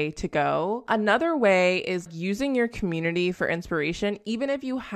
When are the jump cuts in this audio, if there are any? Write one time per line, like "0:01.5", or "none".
0:00.8
0:02.0